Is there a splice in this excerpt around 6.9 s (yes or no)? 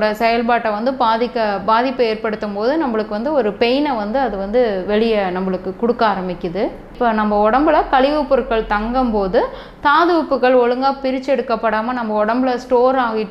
yes